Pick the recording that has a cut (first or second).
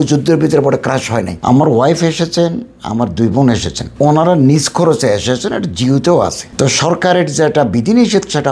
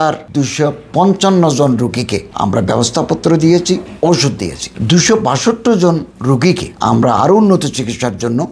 first